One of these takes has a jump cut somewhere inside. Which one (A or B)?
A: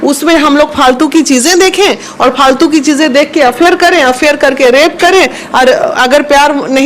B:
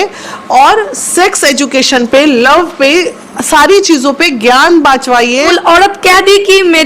B